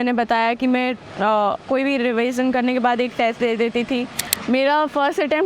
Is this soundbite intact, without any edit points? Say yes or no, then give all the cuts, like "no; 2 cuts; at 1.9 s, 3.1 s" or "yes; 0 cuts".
no; 1 cut; at 4.2 s